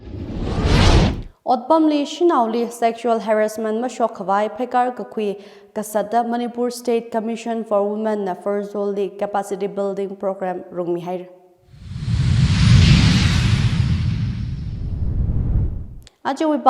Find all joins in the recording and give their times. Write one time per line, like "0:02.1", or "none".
none

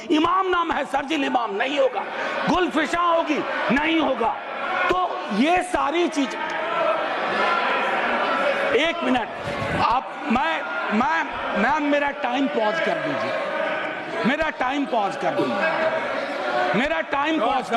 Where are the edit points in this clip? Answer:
none

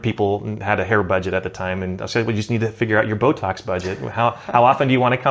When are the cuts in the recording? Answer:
none

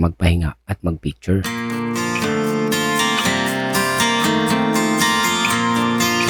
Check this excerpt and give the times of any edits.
none

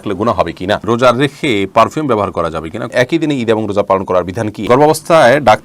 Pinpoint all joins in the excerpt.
0:00.8
0:02.9
0:04.7

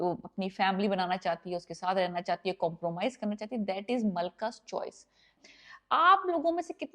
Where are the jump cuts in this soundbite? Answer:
0:05.3

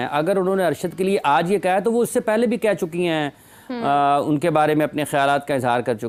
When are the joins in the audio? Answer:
none

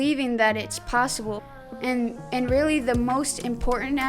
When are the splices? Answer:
0:01.4

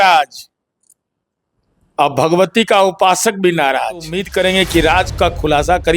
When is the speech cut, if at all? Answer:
0:04.2

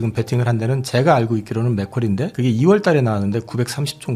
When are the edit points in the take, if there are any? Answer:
none

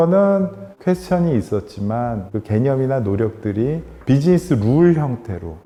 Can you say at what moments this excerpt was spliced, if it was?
none

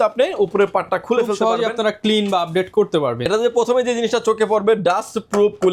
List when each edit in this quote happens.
none

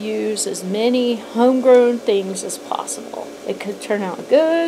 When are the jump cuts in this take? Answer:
0:03.3

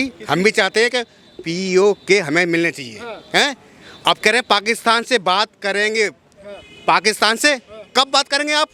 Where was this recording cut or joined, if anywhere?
none

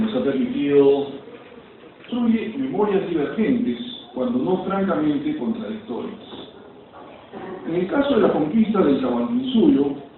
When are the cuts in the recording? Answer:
none

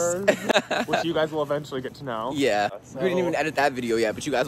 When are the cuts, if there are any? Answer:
0:02.8

